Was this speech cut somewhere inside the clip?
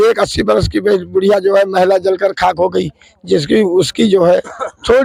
no; 0 cuts

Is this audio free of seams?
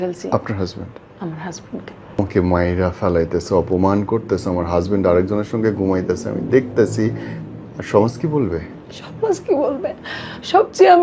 no; 1 cut; at 2.2 s

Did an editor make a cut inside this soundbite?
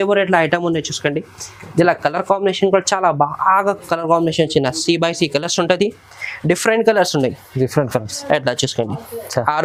no; 0 cuts

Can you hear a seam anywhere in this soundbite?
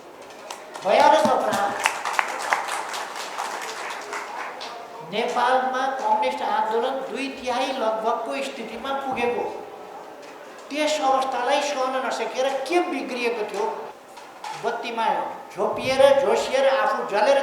yes; 1 cut; at 13.9 s

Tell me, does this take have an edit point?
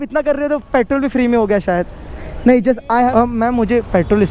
yes; 1 cut; at 3.0 s

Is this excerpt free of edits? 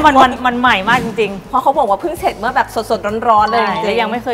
yes; 0 cuts

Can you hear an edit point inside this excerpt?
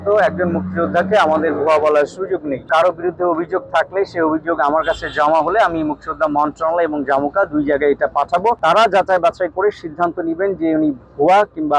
yes; 2 cuts; at 2.7 s, 8.6 s

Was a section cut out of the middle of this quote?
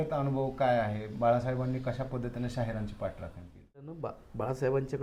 yes; 1 cut; at 4.0 s

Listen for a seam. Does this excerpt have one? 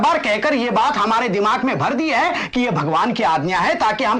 no; 0 cuts

